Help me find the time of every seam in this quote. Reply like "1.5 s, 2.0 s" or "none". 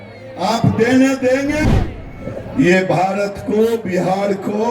1.7 s